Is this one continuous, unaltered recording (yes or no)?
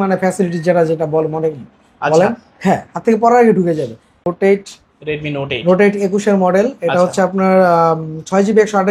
no